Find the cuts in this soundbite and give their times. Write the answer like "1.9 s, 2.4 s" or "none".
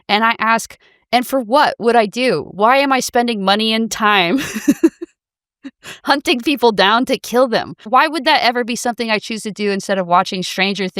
7.8 s